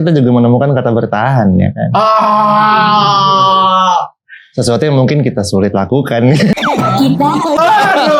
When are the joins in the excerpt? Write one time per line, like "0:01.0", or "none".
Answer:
none